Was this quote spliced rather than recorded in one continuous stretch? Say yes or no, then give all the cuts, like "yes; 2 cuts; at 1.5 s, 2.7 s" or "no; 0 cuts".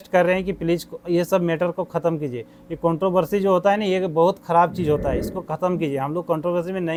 no; 0 cuts